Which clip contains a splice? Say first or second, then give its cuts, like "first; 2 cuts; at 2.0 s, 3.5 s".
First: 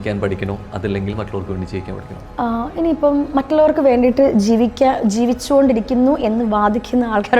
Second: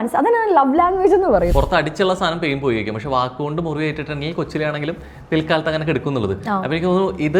second; 1 cut; at 1.5 s